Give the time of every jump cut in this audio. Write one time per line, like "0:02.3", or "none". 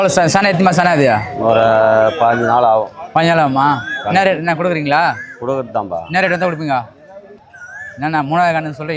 0:07.4